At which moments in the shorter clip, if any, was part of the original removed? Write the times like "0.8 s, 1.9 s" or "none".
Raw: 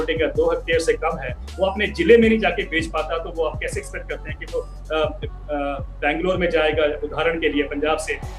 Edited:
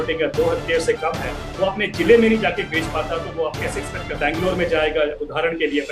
4.1 s